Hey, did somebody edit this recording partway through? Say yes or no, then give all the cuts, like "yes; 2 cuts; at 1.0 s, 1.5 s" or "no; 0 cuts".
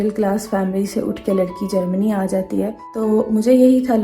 yes; 1 cut; at 2.8 s